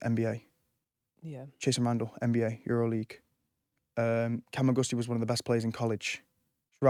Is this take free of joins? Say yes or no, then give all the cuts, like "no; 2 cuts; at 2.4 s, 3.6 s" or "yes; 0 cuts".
yes; 0 cuts